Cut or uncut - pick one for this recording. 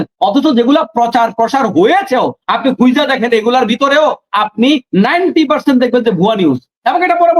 uncut